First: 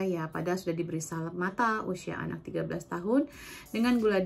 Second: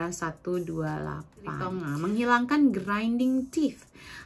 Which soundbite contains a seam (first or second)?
second